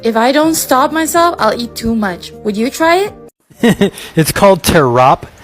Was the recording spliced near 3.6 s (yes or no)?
yes